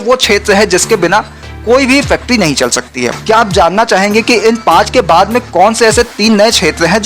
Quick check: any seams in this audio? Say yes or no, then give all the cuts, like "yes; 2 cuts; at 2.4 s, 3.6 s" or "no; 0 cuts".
yes; 1 cut; at 3.1 s